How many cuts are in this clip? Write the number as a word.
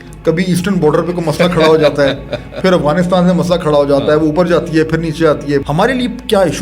one